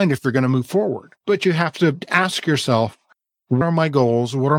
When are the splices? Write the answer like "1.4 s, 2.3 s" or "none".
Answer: 1.1 s, 2.0 s, 3.6 s